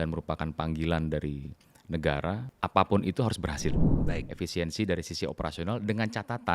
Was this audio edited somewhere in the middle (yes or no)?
yes